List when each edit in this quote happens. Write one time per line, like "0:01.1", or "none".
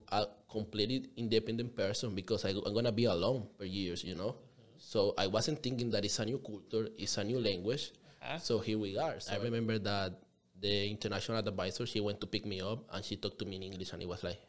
0:09.2